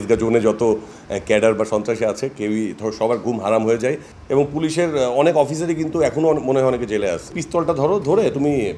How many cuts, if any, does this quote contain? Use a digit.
2